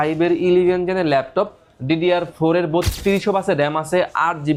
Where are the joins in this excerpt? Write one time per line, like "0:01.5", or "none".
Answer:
none